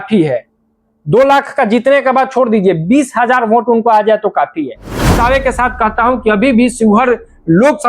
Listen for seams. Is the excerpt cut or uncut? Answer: cut